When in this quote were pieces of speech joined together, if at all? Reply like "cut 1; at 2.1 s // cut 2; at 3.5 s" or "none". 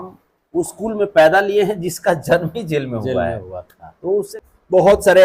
cut 1; at 4.3 s